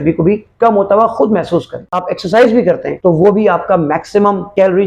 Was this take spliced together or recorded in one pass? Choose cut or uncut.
cut